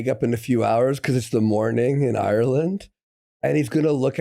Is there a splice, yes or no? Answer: no